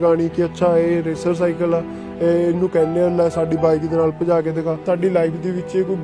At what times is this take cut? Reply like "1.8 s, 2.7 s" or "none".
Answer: 4.8 s

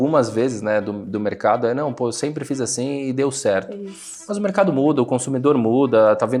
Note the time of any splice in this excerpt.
none

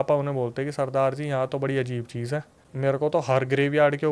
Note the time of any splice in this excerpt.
2.6 s

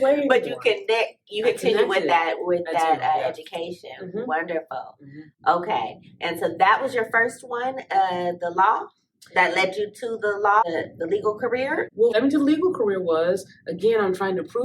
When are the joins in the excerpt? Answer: 10.6 s, 12.1 s

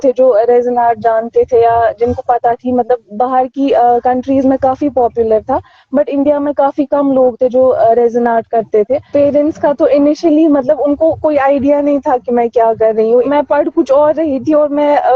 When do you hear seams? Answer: 9.1 s, 13.2 s

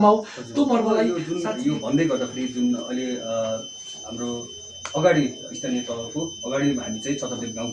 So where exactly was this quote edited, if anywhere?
1.2 s

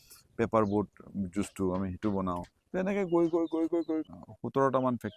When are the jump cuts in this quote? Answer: 4.1 s

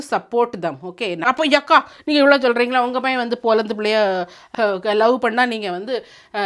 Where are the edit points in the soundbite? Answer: 1.3 s, 4.5 s

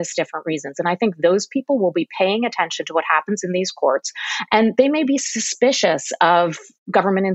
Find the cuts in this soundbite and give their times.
none

